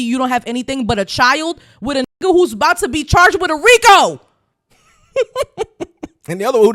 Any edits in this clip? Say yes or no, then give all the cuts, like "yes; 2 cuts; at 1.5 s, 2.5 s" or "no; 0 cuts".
no; 0 cuts